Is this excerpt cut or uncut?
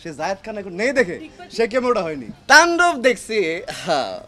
cut